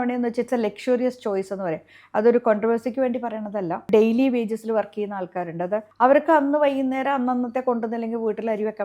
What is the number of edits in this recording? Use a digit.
2